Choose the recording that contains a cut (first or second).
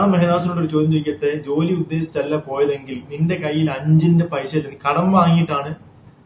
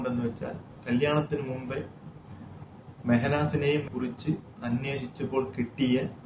second